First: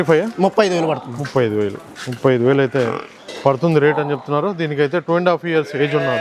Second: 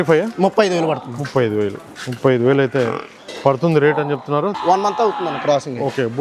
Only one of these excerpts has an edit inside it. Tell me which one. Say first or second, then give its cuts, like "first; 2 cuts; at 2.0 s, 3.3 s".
second; 1 cut; at 4.6 s